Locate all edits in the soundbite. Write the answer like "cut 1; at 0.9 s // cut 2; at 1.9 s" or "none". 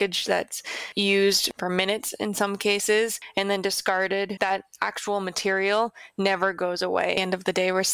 cut 1; at 4.3 s // cut 2; at 7.2 s